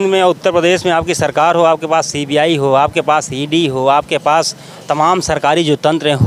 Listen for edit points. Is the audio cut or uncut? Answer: uncut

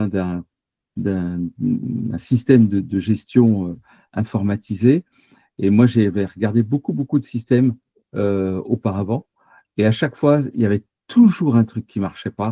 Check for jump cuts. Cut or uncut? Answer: uncut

